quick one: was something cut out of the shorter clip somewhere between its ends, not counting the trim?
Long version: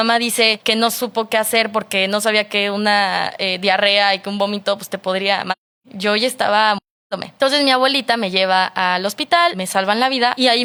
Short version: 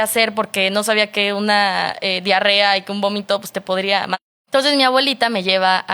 yes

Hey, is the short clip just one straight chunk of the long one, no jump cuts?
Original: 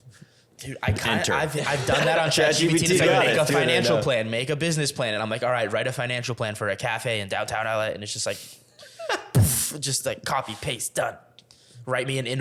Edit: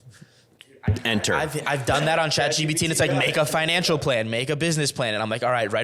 yes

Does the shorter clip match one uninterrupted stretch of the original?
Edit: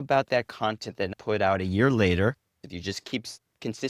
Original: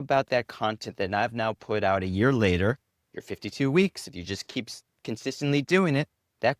no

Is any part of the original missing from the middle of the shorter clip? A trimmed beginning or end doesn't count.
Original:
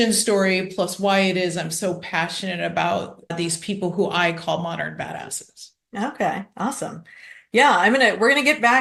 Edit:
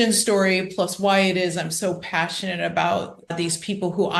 no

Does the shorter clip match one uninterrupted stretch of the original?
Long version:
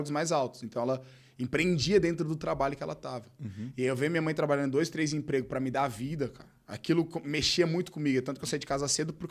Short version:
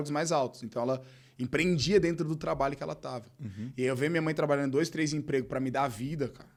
yes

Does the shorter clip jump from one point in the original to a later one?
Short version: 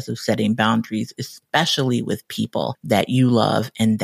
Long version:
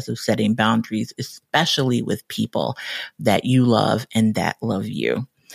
yes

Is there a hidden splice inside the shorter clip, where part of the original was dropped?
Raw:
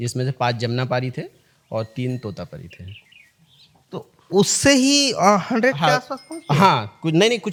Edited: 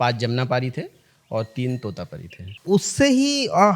yes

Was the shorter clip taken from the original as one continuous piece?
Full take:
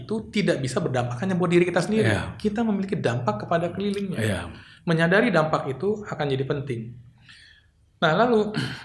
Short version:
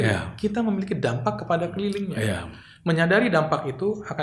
yes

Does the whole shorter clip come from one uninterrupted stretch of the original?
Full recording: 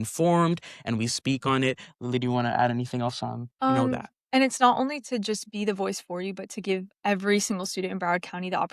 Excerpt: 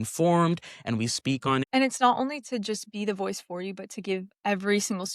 no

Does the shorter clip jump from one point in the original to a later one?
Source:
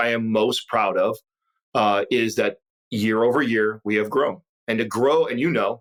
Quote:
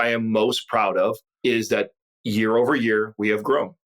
yes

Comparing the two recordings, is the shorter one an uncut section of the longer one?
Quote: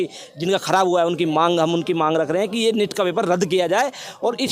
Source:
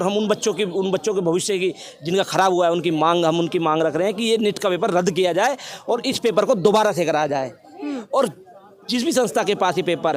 yes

